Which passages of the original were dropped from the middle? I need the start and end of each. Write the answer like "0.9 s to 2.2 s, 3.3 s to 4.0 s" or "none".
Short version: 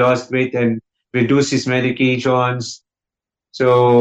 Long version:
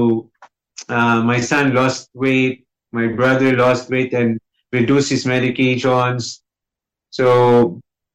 none